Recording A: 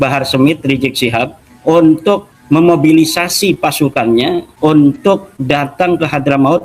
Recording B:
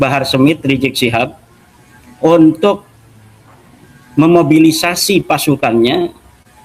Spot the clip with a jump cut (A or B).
A